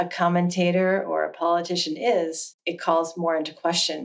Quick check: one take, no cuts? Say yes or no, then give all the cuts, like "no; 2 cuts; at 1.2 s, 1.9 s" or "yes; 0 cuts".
yes; 0 cuts